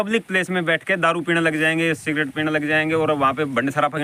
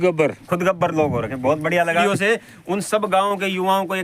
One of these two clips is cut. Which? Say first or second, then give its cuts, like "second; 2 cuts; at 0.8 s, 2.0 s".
second; 1 cut; at 2.0 s